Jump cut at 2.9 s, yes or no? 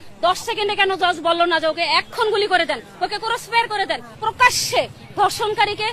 no